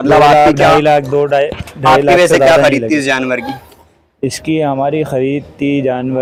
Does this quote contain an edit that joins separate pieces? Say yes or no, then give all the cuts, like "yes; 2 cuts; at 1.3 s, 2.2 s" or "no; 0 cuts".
no; 0 cuts